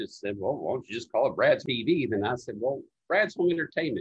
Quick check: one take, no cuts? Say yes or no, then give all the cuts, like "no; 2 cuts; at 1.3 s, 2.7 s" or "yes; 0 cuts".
no; 1 cut; at 1.6 s